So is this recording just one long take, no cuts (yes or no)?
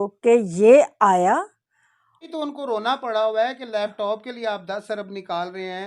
no